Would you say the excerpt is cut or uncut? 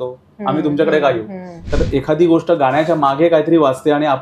cut